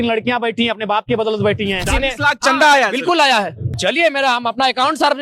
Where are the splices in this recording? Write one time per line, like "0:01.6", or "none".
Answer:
0:01.9
0:03.7